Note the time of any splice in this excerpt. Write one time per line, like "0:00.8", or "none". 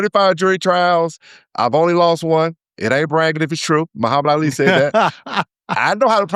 0:04.8